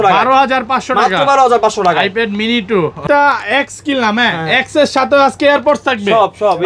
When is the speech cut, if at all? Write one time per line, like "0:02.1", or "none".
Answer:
0:03.0